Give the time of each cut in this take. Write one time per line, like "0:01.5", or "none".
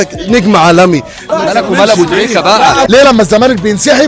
0:01.2
0:02.9